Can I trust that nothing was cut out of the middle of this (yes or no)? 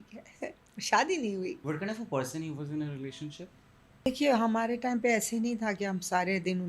no